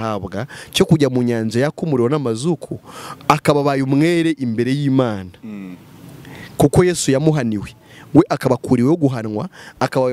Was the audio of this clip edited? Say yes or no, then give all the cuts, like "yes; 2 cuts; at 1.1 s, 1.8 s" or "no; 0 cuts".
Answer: no; 0 cuts